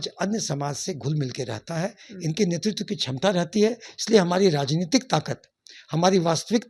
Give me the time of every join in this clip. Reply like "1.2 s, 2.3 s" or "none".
none